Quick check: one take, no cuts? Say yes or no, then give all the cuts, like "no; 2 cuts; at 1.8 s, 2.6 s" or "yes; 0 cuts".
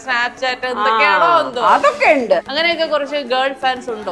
no; 1 cut; at 2.5 s